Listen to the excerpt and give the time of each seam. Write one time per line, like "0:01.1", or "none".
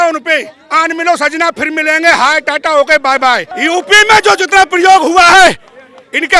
0:03.5